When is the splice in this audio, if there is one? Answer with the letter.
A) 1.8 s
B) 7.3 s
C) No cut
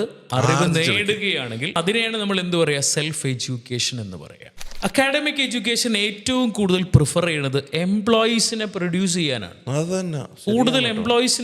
A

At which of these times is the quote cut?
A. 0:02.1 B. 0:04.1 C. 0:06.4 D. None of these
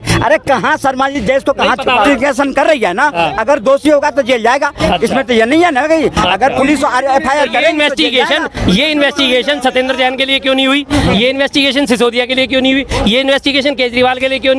A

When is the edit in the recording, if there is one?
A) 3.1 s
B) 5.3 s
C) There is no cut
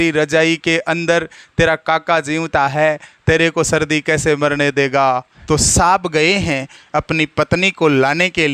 B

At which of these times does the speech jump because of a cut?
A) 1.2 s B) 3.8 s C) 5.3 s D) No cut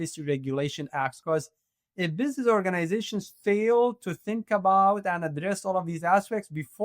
A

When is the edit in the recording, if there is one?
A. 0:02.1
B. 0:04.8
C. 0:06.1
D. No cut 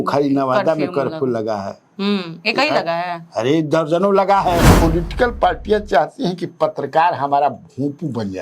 B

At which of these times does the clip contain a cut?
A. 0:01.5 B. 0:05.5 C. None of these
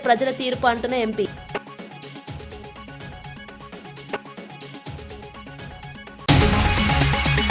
C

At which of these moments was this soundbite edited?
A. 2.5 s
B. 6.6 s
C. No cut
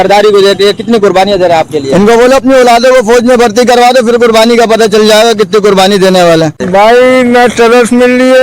B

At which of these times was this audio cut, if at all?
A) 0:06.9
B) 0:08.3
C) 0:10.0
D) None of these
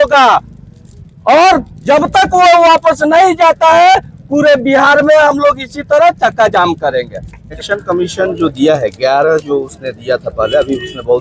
D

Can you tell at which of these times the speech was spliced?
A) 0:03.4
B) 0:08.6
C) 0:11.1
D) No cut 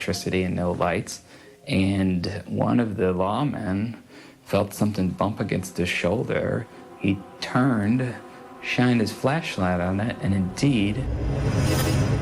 C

